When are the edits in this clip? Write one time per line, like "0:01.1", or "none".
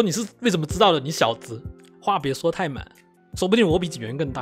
none